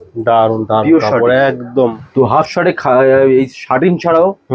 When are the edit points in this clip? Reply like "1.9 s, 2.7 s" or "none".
1.7 s